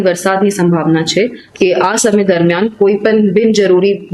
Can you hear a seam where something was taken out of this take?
yes; 1 cut; at 1.4 s

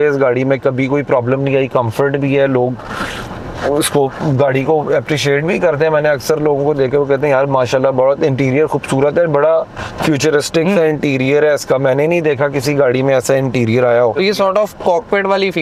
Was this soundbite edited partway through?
no; 0 cuts

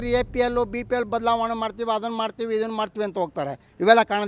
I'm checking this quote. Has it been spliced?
no; 0 cuts

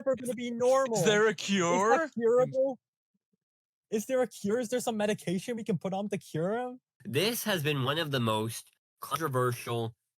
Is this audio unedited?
no; 1 cut; at 6.9 s

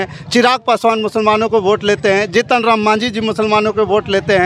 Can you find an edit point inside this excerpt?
no; 0 cuts

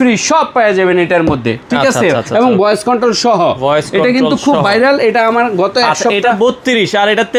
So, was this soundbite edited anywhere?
no; 0 cuts

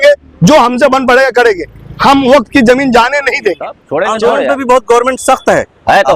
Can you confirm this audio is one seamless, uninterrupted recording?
no; 1 cut; at 3.8 s

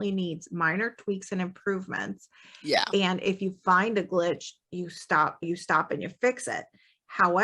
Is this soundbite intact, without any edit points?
no; 1 cut; at 5.4 s

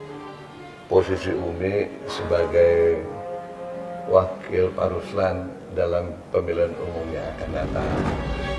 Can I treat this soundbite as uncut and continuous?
yes; 0 cuts

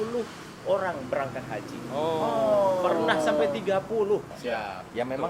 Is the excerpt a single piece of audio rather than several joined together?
no; 1 cut; at 4.3 s

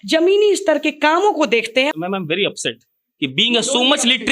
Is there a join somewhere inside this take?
yes; 1 cut; at 1.9 s

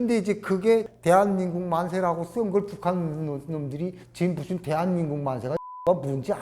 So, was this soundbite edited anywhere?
yes; 1 cut; at 0.9 s

